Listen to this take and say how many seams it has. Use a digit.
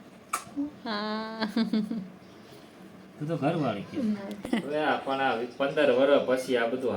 1